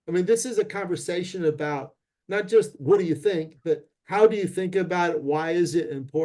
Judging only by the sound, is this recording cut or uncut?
uncut